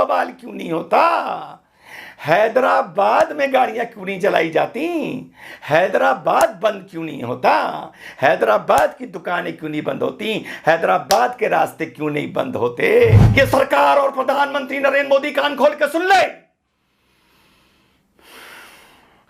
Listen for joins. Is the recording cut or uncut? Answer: cut